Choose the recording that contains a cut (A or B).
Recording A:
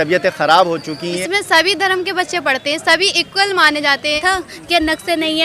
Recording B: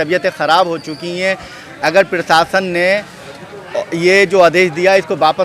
A